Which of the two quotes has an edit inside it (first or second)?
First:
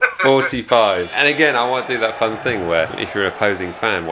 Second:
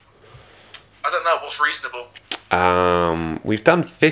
first